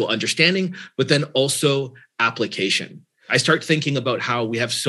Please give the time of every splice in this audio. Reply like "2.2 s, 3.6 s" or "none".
3.2 s